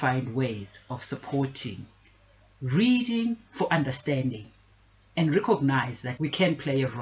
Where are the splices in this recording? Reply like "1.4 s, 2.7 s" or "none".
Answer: 6.0 s